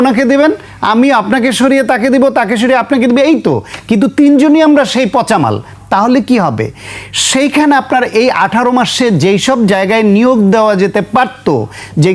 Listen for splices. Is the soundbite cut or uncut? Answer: uncut